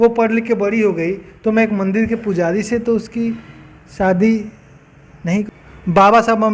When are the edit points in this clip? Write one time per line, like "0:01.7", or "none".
0:05.5